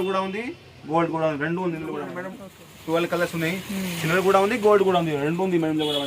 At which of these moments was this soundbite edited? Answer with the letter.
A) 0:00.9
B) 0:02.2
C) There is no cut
B